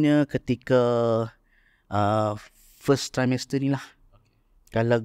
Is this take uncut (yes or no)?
yes